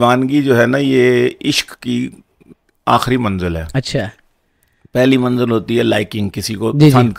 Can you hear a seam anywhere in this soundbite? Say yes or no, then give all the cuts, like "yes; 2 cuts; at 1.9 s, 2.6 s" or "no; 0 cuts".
no; 0 cuts